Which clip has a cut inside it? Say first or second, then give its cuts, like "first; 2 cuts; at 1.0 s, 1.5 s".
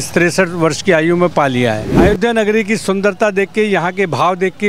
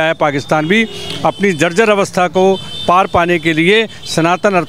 first; 1 cut; at 1.9 s